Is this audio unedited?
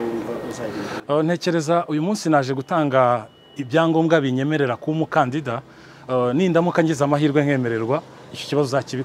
yes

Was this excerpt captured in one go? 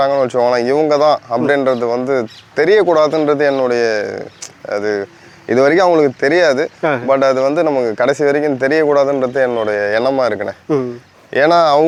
yes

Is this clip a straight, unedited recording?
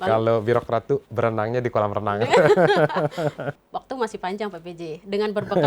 no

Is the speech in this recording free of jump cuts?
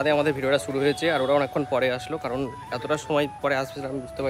yes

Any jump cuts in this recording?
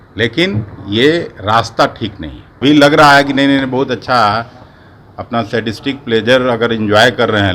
yes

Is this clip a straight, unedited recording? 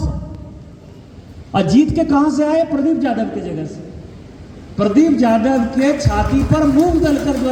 yes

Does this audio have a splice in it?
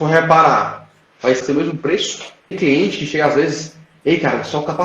yes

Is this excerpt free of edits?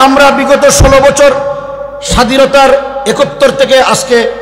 yes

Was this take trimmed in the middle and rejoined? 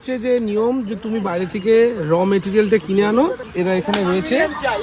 no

